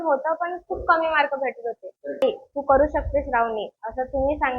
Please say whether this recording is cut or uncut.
cut